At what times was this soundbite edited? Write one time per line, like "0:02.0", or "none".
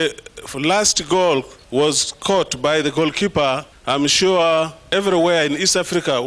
0:01.6
0:03.7
0:04.9